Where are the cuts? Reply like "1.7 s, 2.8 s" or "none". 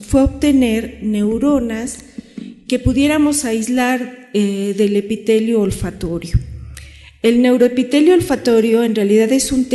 6.2 s